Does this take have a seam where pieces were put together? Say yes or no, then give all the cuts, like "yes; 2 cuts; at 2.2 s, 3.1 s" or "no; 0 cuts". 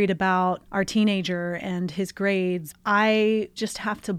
yes; 1 cut; at 2.7 s